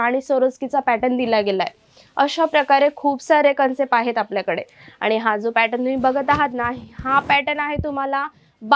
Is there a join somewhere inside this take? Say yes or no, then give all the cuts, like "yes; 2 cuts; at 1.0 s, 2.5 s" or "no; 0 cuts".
no; 0 cuts